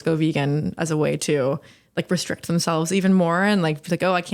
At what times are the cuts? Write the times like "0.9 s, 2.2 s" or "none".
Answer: none